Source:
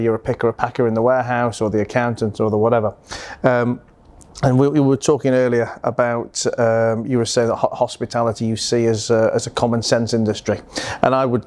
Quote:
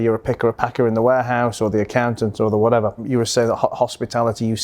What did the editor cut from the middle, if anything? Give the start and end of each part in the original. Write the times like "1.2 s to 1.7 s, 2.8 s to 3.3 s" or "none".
3.0 s to 7.0 s

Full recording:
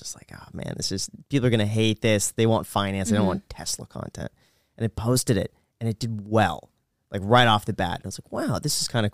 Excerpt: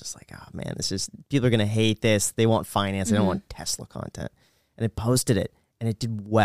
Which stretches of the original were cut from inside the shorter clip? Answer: none

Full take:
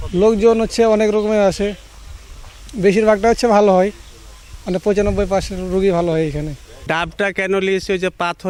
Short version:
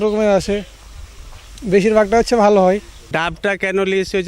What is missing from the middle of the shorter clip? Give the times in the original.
4.1 s to 6.7 s

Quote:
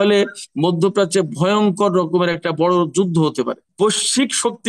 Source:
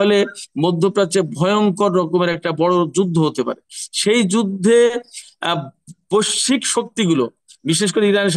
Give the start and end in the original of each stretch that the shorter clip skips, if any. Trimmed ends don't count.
3.6 s to 5.9 s

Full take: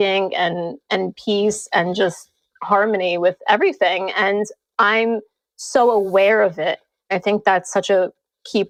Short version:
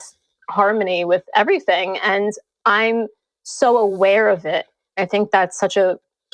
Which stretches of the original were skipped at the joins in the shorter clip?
none

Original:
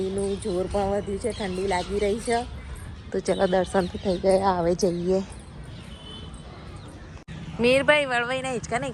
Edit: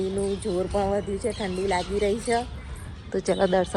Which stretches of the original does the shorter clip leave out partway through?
none

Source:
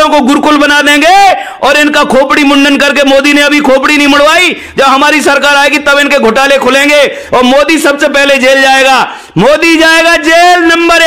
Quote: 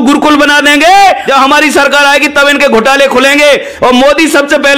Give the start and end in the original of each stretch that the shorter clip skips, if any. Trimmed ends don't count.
1.4 s to 4.7 s

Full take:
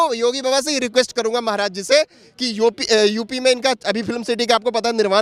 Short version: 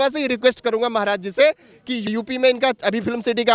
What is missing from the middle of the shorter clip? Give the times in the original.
2.6 s to 3.1 s

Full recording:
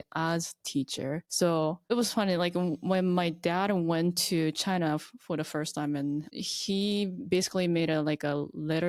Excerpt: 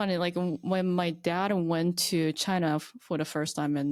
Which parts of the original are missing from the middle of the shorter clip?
none

